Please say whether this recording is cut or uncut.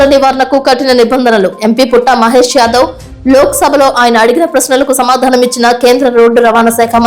uncut